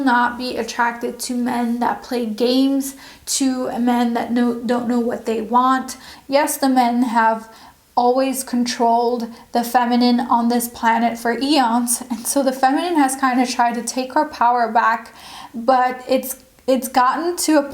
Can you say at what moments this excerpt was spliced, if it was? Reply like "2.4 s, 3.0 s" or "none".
6.0 s